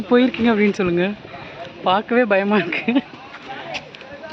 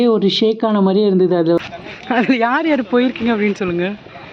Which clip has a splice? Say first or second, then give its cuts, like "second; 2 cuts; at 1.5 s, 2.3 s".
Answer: second; 1 cut; at 1.6 s